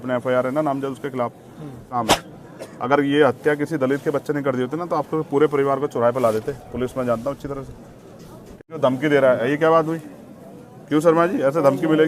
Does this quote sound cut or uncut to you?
cut